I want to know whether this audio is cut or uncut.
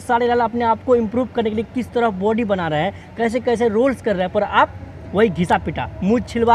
uncut